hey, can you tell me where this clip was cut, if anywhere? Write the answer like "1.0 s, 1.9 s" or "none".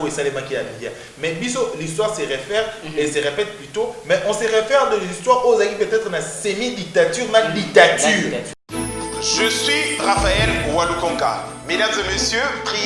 8.5 s

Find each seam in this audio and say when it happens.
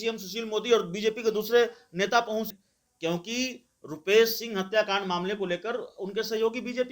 2.5 s

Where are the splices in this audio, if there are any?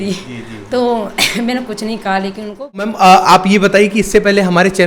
2.9 s

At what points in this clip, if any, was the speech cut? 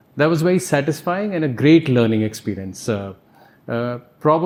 none

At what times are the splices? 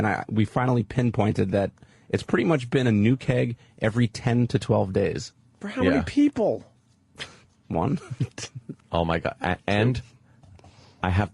6.3 s

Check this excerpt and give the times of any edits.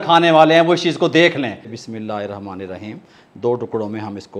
1.7 s

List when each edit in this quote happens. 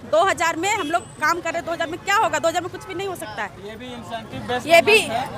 none

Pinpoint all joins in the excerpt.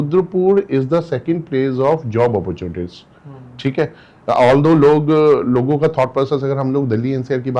none

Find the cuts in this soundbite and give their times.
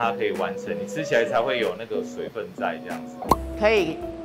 3.3 s

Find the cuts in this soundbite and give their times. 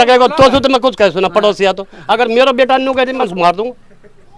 3.3 s

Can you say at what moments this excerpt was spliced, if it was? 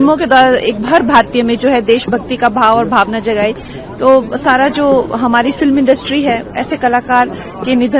none

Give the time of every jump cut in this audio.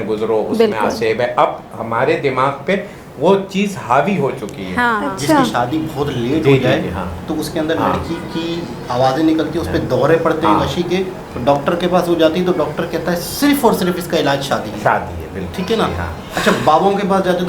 4.9 s

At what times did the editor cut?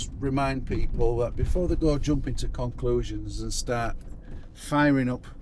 none

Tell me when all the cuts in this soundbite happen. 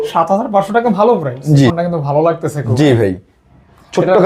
1.7 s

